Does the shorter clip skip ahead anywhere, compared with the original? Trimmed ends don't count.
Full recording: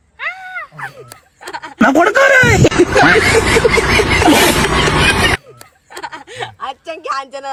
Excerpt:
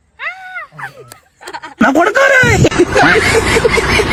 no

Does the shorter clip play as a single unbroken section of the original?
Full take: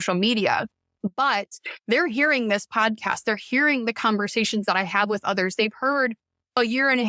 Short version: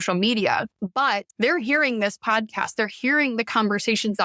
no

